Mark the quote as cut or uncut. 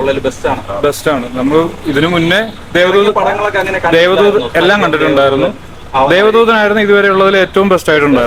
uncut